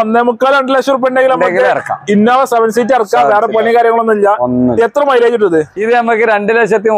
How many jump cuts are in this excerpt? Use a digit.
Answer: 1